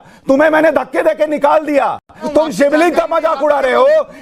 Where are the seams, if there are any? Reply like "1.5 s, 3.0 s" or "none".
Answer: 2.2 s